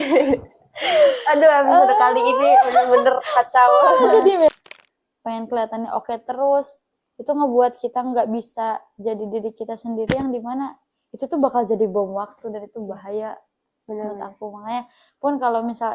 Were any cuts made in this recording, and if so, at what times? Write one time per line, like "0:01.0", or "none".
0:04.5

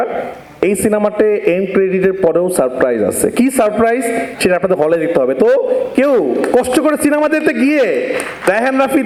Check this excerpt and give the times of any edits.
none

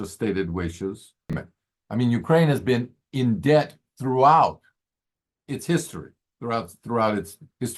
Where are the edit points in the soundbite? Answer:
0:01.5

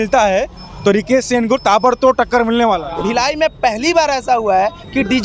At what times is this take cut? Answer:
0:02.9

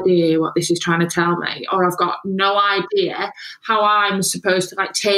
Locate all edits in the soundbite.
none

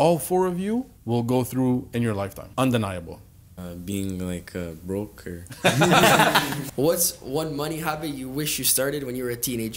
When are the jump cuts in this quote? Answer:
0:01.0
0:02.4
0:03.4
0:06.5

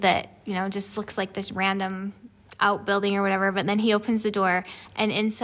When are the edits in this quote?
none

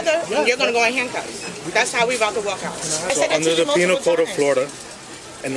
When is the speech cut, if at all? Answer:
0:03.0

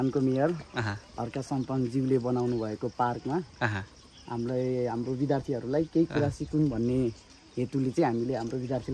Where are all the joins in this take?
none

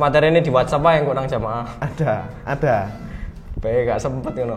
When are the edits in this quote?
none

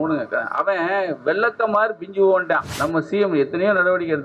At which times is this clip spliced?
0:02.7

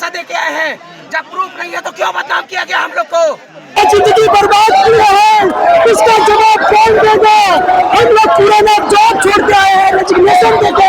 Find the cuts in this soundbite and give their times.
0:03.8

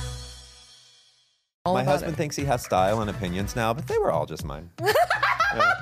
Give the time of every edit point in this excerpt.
0:01.6

